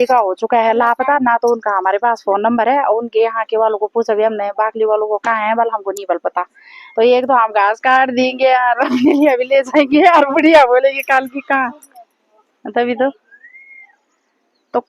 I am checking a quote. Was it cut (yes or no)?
no